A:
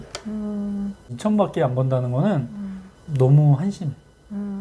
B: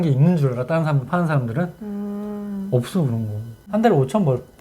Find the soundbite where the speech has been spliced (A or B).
B